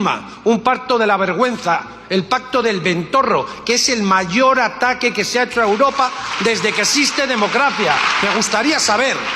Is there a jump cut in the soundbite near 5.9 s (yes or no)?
no